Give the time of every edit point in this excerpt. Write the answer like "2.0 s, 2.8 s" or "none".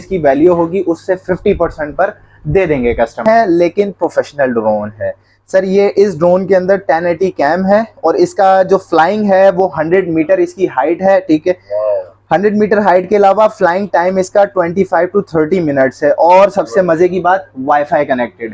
3.2 s